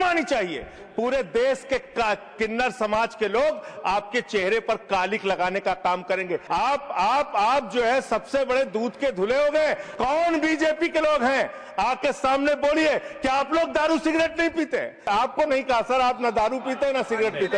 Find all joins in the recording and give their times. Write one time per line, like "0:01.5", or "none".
0:06.4
0:09.9
0:15.0